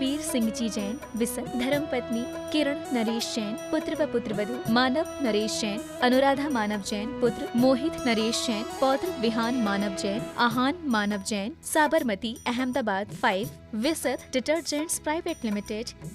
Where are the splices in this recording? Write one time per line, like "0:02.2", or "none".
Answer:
0:01.4